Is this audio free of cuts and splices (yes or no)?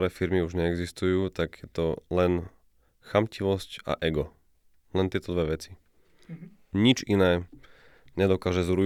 yes